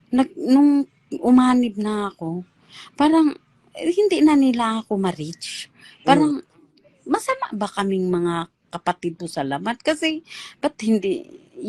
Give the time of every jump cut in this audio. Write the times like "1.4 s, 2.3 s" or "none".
none

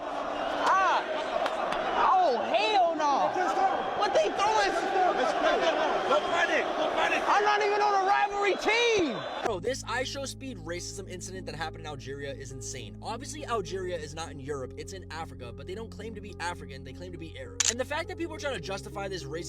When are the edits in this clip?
9.4 s

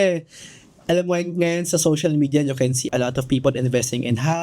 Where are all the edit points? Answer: 2.8 s

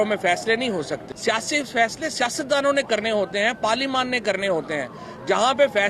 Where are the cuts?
1.0 s

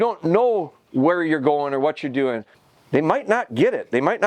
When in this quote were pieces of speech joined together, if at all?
2.5 s

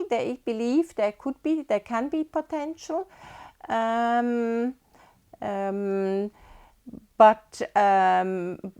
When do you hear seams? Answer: none

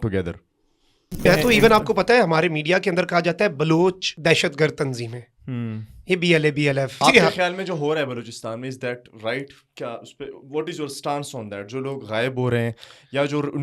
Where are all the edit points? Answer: 1.2 s, 4.1 s, 7.0 s

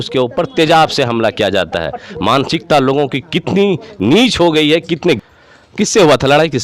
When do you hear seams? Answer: 5.2 s

